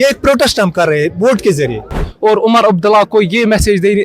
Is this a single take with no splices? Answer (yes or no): no